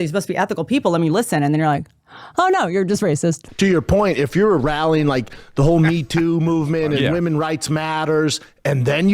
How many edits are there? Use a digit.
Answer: 1